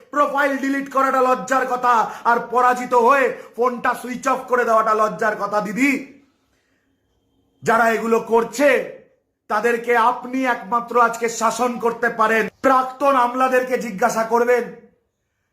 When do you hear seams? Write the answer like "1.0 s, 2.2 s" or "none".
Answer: 12.5 s